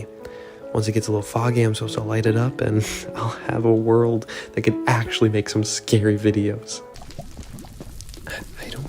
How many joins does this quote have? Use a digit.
1